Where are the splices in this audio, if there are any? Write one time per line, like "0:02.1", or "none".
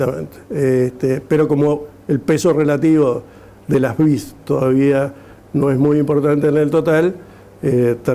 none